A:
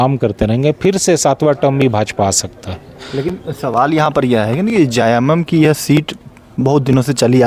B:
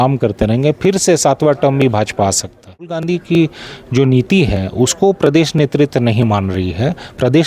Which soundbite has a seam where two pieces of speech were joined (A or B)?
B